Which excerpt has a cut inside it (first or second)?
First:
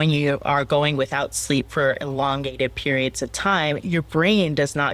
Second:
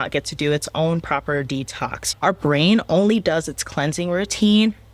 second